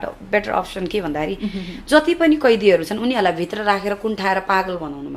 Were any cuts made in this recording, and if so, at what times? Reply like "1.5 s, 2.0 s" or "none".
none

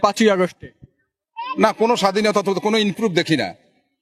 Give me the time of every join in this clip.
none

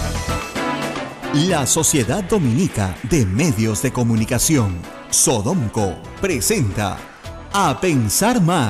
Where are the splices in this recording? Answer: 1.2 s

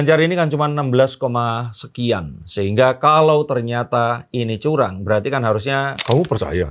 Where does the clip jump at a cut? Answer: none

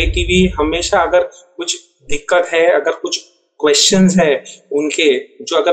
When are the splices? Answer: none

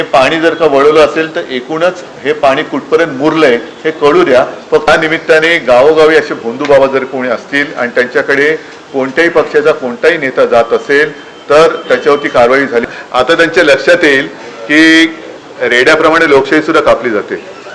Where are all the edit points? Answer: 4.9 s, 12.9 s

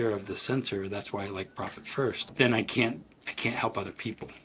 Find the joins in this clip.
2.2 s

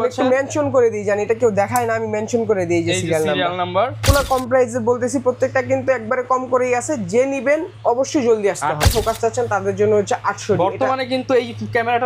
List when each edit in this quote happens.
4.1 s, 8.9 s

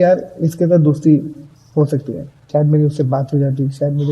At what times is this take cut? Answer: 2.4 s

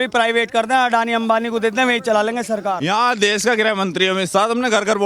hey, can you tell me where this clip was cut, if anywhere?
2.8 s

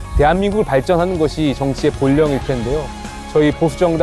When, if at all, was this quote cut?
3.1 s

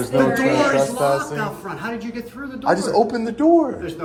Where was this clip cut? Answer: none

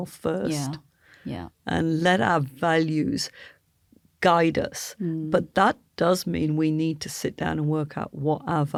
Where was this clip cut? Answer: none

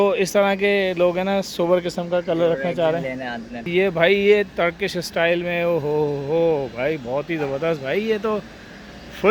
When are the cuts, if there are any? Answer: 3.7 s

